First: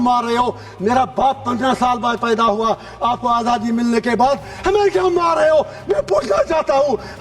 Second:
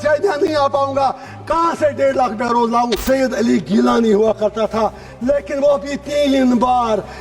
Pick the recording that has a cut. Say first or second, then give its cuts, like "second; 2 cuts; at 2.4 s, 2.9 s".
second; 1 cut; at 3.0 s